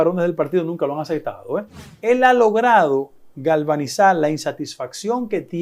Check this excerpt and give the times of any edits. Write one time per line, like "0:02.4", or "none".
0:01.9